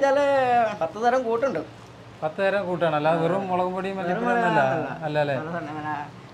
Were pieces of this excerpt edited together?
no; 0 cuts

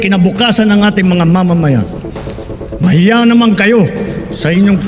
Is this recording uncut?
yes; 0 cuts

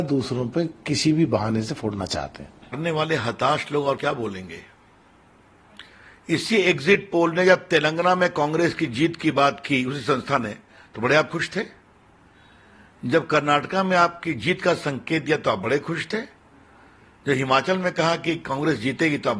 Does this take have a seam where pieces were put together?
yes; 1 cut; at 2.6 s

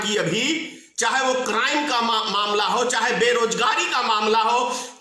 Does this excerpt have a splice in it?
no; 0 cuts

